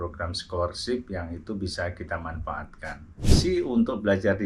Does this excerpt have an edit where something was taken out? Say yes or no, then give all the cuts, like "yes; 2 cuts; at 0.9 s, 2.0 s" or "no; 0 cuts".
yes; 1 cut; at 3.3 s